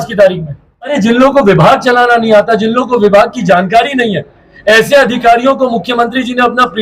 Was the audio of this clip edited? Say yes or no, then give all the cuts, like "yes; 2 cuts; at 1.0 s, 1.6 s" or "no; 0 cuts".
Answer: yes; 1 cut; at 0.9 s